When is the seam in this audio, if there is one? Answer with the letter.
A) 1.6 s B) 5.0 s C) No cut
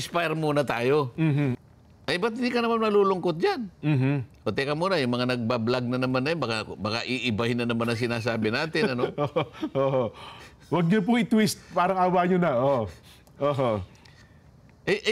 A